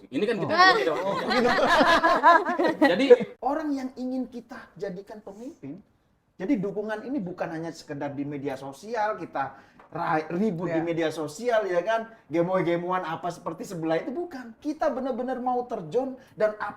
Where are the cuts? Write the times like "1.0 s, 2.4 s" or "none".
3.3 s